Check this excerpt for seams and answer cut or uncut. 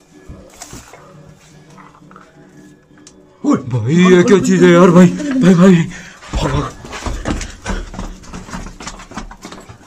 uncut